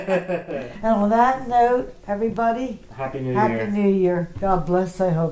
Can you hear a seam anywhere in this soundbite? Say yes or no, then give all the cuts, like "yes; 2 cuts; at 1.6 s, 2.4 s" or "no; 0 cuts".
yes; 1 cut; at 4.3 s